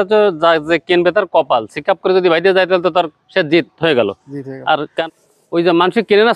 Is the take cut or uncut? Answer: cut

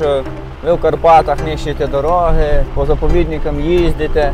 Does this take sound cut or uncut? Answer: cut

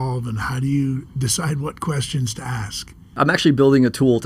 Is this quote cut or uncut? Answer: cut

